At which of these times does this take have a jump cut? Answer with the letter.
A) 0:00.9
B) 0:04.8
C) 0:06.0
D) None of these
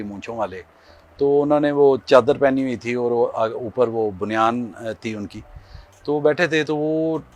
D